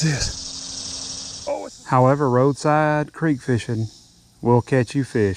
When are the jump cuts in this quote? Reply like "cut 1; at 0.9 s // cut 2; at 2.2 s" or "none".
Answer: cut 1; at 1.4 s